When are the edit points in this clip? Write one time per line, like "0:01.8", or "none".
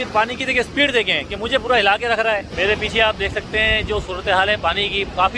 0:02.5